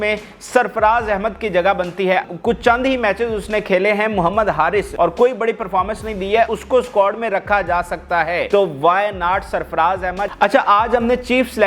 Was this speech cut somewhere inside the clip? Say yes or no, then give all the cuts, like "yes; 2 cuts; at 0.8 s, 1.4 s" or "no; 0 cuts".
yes; 5 cuts; at 2.2 s, 4.9 s, 6.5 s, 8.5 s, 10.3 s